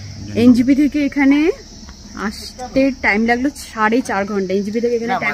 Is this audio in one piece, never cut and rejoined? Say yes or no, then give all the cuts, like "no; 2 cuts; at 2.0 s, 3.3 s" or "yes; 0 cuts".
yes; 0 cuts